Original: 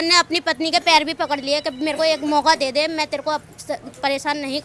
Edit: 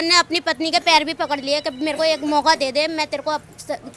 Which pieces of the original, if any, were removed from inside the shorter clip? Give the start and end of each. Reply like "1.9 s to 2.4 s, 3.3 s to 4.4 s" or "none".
none